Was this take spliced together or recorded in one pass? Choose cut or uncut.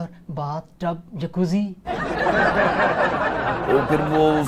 uncut